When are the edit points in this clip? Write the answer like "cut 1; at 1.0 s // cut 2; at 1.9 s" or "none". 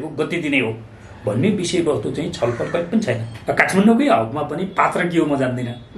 cut 1; at 3.3 s